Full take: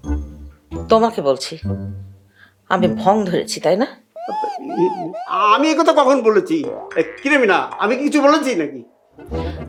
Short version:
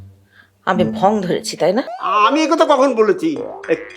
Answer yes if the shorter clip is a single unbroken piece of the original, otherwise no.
no